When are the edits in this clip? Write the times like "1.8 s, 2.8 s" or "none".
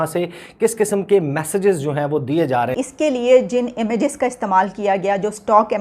2.7 s